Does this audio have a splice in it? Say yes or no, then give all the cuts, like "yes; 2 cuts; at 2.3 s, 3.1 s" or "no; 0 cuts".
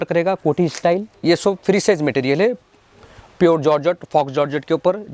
yes; 1 cut; at 1.1 s